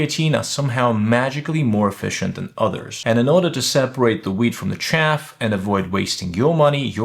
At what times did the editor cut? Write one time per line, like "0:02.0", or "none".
0:02.9